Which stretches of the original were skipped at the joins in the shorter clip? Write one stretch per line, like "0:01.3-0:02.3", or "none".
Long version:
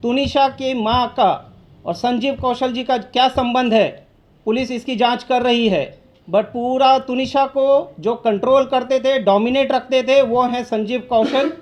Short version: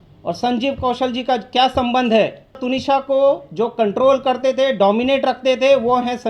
0:04.2-0:07.1

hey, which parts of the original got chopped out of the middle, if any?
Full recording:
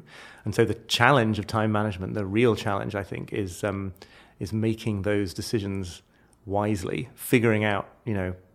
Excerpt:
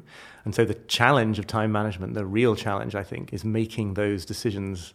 0:03.2-0:04.3

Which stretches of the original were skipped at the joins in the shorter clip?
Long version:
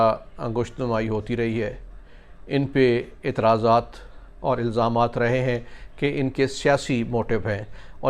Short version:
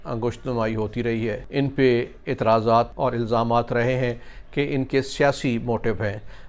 0:01.8-0:02.4
0:03.9-0:04.4

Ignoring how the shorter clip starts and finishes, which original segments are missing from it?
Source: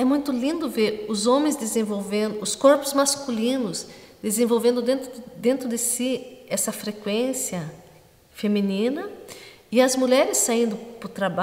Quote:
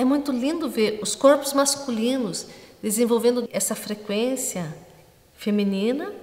0:01.1-0:02.5
0:04.8-0:06.4

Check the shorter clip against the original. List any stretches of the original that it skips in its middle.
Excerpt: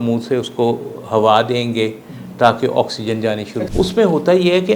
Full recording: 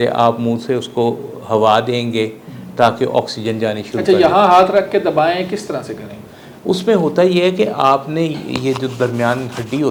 0:03.9-0:06.4

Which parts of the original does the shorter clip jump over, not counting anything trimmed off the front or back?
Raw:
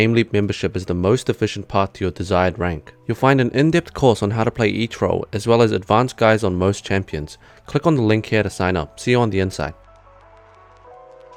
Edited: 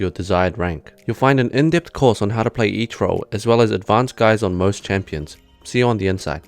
0:07.6-0:08.9

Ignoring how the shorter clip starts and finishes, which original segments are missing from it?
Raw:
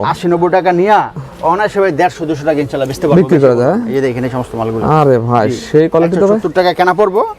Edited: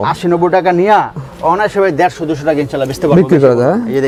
none

